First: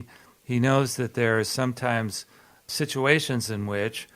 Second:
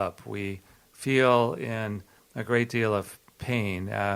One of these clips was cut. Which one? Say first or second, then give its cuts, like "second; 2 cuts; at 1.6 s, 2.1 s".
first; 1 cut; at 2.6 s